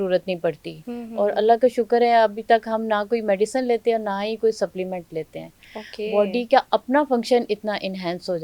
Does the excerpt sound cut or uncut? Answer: uncut